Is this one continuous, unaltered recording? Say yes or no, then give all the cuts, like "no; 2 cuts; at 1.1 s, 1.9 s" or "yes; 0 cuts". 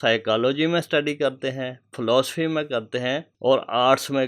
no; 1 cut; at 3.3 s